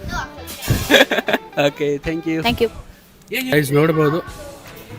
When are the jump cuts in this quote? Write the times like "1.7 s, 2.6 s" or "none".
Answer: 3.5 s